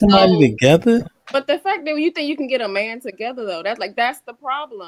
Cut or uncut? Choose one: uncut